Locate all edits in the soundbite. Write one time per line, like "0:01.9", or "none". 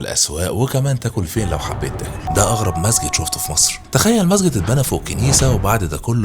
0:02.3